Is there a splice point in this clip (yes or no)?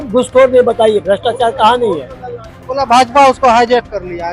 yes